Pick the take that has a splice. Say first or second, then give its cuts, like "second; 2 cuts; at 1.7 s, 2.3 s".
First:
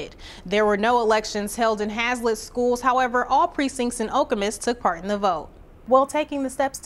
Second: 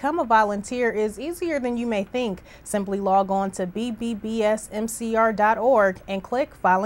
first; 1 cut; at 5.8 s